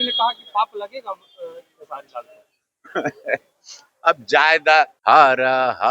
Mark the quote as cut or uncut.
cut